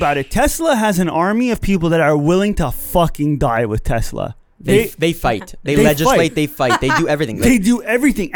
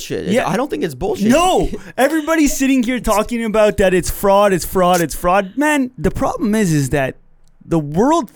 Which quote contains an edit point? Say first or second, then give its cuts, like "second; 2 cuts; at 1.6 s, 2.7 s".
second; 1 cut; at 5.9 s